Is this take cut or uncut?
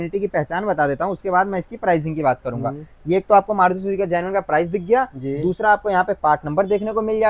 uncut